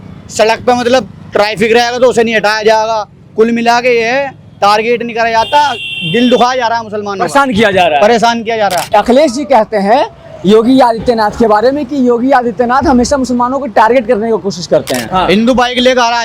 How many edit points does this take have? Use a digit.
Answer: 2